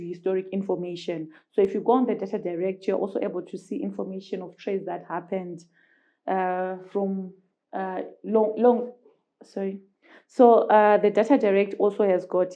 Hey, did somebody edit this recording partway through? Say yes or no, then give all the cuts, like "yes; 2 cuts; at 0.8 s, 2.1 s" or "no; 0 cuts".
no; 0 cuts